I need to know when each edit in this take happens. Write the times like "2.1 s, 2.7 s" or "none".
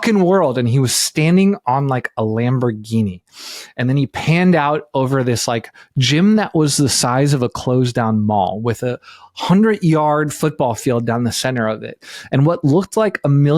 none

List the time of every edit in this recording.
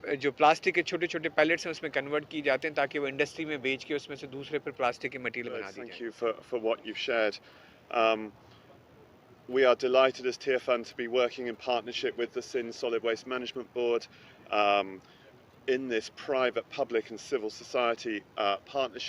6.1 s

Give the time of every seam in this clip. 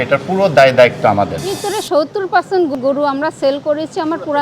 1.6 s, 2.7 s

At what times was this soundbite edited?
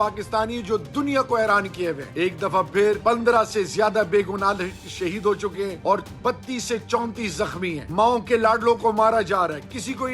2.1 s, 3.0 s, 5.8 s, 7.8 s

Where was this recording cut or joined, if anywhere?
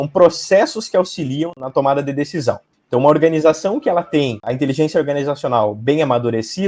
1.5 s

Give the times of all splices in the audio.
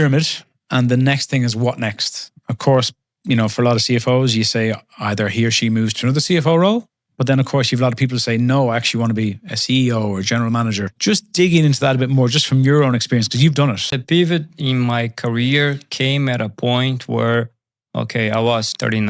13.9 s

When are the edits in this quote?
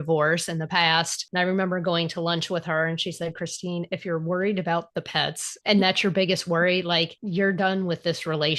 1.2 s, 5.5 s, 7.2 s

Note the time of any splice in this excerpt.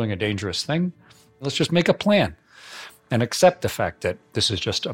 1.5 s

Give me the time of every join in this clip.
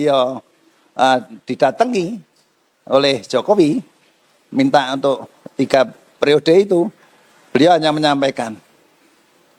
none

